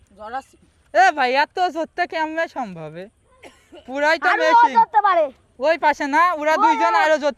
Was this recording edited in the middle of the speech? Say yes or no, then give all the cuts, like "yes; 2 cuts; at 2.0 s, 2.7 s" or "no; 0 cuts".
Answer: no; 0 cuts